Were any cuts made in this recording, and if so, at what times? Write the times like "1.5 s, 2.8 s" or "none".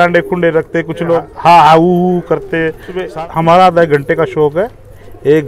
1.3 s, 3.0 s